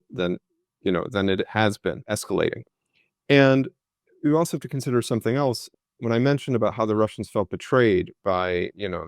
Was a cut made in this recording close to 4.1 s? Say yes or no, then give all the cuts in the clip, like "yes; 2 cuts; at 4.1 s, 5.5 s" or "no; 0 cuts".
no; 2 cuts; at 2.1 s, 5.7 s